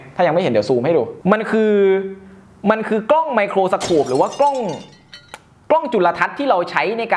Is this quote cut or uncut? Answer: uncut